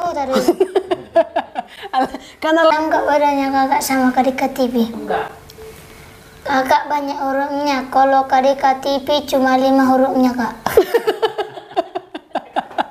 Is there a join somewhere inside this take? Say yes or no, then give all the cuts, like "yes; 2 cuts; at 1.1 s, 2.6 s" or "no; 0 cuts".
yes; 1 cut; at 2.7 s